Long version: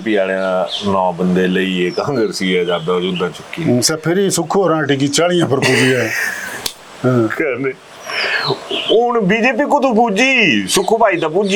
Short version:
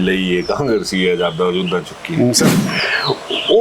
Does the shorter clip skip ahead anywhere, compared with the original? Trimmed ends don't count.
yes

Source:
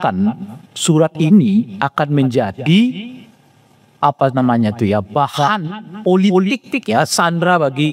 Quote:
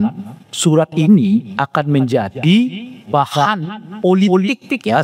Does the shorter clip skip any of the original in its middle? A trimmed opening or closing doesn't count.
yes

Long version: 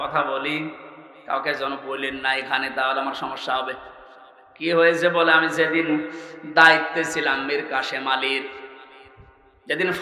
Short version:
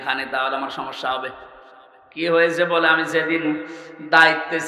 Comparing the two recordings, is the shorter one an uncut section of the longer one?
yes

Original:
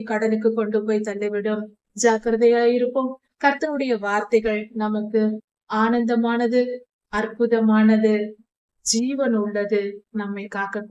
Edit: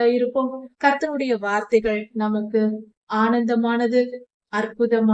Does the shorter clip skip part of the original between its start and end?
no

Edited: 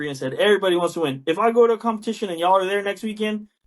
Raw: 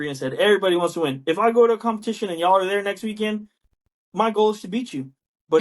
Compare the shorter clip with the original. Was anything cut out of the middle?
no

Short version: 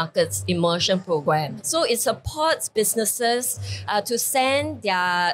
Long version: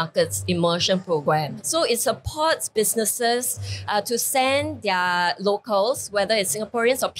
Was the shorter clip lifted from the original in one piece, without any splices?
yes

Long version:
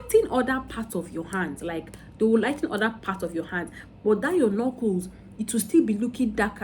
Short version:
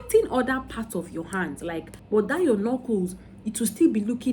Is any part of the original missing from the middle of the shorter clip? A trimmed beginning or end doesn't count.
yes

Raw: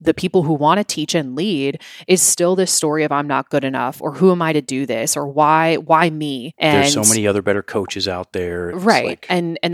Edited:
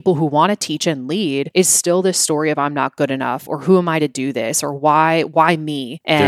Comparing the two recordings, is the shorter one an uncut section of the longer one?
no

